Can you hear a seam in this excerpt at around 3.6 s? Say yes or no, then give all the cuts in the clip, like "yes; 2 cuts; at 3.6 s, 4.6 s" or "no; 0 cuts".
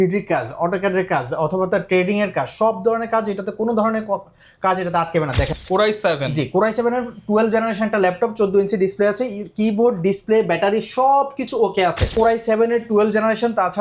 no; 2 cuts; at 5.5 s, 12.1 s